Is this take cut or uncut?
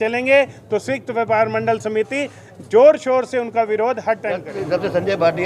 cut